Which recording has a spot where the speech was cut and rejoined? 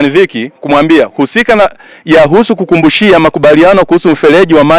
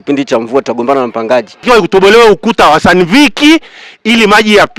second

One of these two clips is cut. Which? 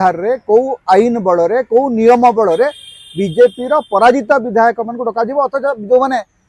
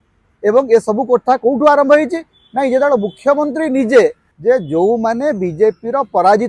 second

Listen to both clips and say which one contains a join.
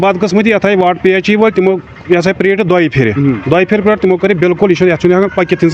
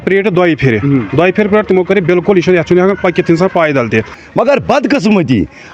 second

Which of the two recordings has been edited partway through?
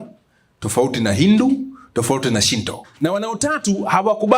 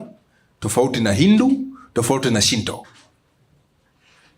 first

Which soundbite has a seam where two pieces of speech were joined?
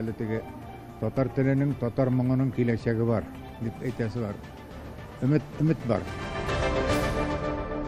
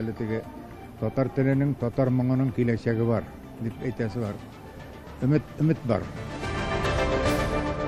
first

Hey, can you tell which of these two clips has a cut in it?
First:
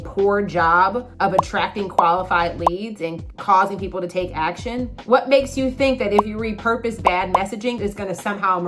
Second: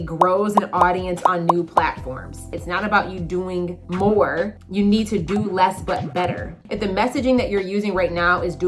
second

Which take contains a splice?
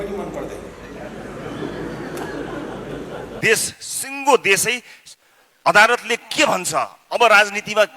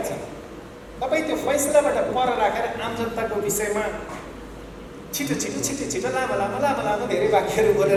first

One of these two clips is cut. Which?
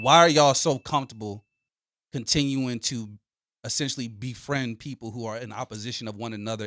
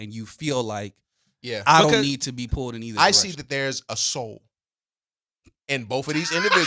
second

